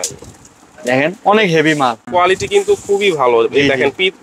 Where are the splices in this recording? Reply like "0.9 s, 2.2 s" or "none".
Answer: 2.1 s